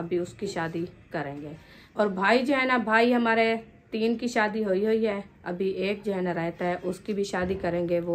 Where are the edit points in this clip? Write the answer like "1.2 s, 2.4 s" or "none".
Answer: none